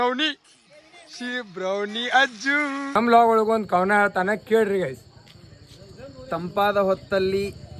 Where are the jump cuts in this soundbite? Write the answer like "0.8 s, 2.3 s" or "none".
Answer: 2.9 s